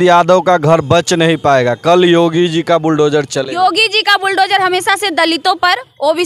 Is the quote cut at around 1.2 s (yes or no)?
no